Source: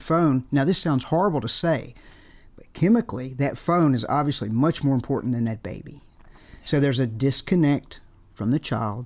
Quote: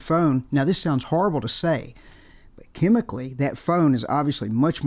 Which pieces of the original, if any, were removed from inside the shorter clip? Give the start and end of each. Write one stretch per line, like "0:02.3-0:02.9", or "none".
none